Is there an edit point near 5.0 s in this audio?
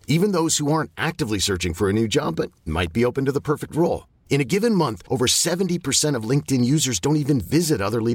no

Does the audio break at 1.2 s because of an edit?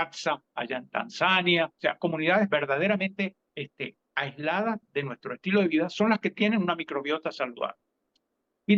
no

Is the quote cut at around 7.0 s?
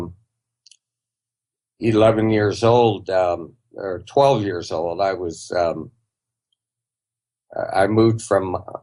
no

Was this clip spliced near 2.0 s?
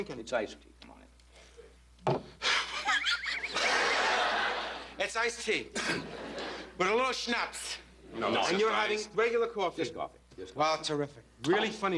yes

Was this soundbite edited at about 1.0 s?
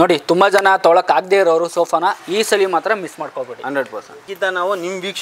no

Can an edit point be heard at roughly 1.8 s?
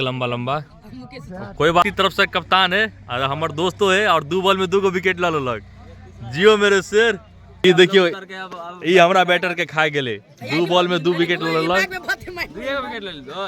yes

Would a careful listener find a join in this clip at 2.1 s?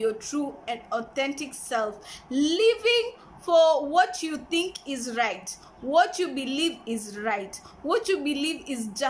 yes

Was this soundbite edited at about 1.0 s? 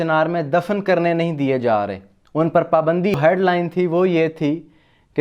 no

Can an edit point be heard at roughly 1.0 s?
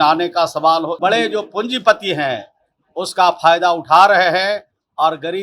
yes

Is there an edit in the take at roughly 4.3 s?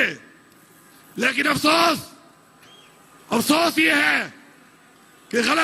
no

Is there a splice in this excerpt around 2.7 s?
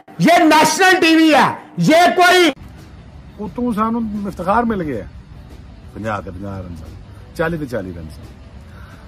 yes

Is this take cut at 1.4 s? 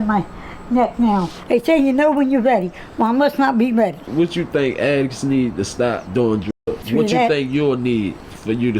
yes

